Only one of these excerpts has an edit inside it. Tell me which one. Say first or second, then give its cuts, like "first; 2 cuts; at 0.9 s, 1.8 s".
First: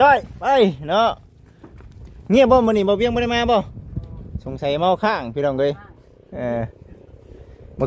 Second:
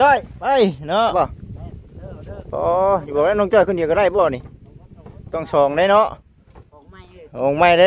second; 1 cut; at 1.1 s